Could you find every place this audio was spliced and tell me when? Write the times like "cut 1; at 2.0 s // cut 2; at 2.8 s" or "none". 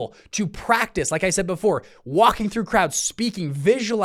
none